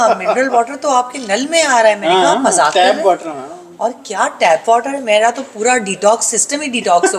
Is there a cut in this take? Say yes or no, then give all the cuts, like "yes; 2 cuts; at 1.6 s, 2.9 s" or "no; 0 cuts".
no; 0 cuts